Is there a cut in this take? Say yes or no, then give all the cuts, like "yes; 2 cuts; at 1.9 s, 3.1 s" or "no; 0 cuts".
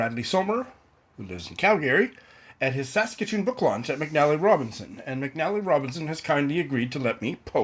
no; 0 cuts